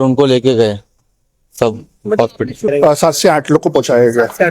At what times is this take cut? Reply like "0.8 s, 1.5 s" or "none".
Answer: 2.7 s